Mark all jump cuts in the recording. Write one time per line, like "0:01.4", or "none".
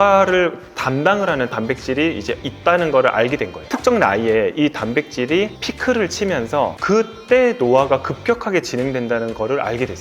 0:03.6